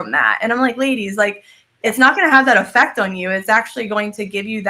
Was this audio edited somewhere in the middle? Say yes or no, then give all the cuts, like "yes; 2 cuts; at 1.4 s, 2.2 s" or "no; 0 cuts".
no; 0 cuts